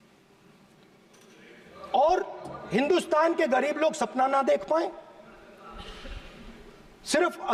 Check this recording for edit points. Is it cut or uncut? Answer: uncut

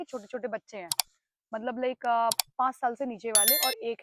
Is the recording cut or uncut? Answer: uncut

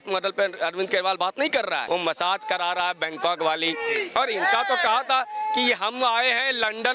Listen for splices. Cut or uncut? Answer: cut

